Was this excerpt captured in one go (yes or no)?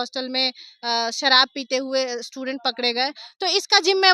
yes